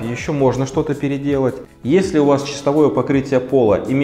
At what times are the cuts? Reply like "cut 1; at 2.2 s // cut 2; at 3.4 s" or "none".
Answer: cut 1; at 1.7 s